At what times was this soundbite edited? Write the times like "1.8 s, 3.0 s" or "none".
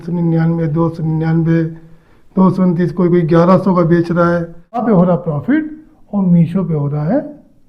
4.8 s